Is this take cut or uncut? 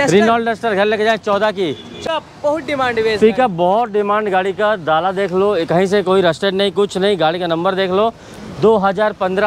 cut